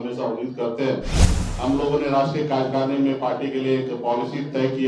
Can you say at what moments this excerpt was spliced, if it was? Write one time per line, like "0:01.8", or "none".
0:01.3